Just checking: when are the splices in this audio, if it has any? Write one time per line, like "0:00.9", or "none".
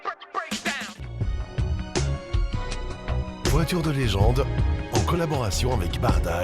0:01.0